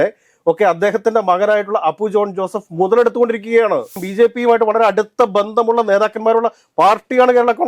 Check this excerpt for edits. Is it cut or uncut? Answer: cut